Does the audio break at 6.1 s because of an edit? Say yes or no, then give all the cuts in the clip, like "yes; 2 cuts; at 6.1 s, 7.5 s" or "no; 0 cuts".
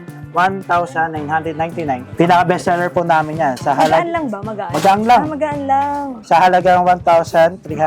yes; 2 cuts; at 2.1 s, 6.1 s